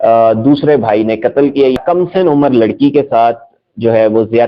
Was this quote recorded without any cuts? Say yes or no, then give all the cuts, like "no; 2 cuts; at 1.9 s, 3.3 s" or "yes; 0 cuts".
no; 1 cut; at 1.8 s